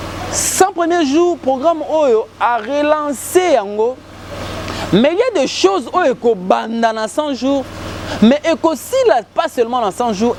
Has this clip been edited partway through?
no; 0 cuts

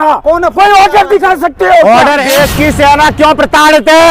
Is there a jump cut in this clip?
yes; 1 cut; at 2.2 s

